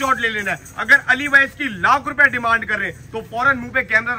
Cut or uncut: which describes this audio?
uncut